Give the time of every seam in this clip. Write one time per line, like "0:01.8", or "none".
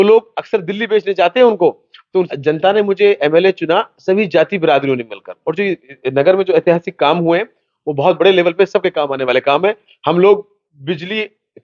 0:02.3